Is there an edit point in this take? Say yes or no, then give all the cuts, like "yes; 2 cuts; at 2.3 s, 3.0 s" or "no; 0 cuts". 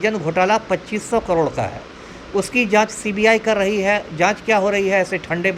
no; 0 cuts